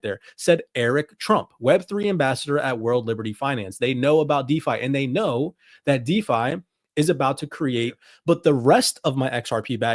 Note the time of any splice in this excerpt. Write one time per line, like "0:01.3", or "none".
0:08.1